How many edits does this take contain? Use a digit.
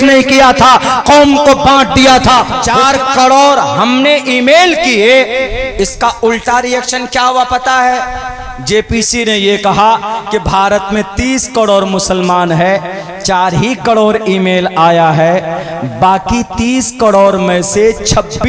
1